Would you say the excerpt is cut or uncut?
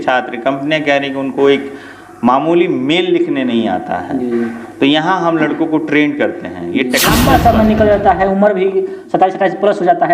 cut